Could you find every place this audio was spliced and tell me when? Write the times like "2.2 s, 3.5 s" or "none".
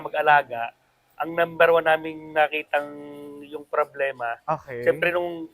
none